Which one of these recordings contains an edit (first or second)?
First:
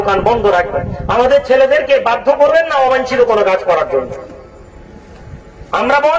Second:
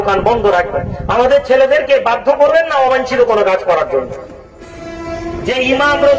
second